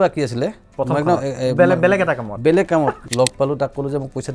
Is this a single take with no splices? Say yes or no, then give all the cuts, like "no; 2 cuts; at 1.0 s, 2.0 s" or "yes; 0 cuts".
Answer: no; 1 cut; at 3.0 s